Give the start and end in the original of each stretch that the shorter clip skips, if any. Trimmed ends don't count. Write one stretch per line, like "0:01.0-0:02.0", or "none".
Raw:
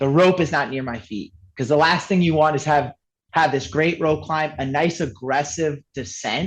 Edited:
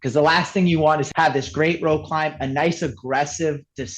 0:02.6-0:03.2